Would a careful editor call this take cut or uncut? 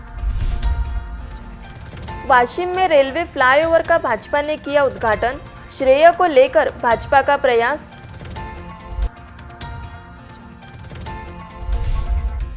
uncut